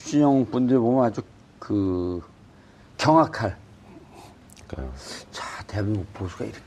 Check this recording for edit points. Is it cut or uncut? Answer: uncut